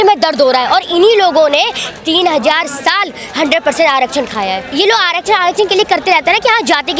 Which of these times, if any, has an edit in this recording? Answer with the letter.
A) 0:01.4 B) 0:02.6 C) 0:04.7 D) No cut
C